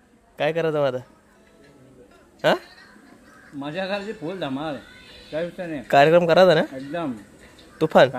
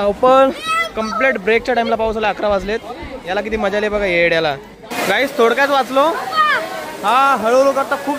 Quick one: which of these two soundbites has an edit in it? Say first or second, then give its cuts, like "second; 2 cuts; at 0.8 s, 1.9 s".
second; 1 cut; at 4.8 s